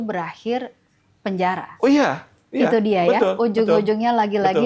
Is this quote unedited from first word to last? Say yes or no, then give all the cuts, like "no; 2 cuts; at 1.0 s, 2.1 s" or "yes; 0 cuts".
yes; 0 cuts